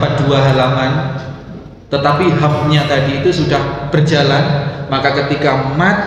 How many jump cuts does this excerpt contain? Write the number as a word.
zero